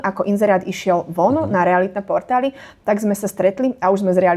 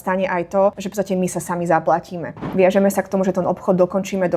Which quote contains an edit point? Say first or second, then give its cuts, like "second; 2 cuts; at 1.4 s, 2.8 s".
second; 2 cuts; at 0.8 s, 2.4 s